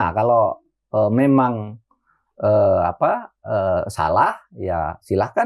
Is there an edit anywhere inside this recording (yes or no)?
no